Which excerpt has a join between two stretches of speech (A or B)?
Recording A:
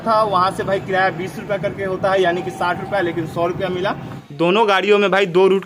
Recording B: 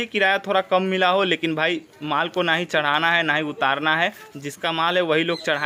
A